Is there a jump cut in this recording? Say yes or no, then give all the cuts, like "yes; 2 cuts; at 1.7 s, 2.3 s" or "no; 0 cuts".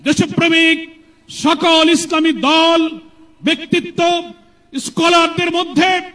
no; 0 cuts